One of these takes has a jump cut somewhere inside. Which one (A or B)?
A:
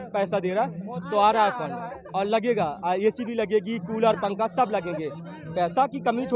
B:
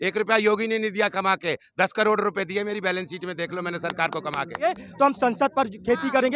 B